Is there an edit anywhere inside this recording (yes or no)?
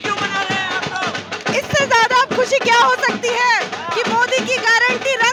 no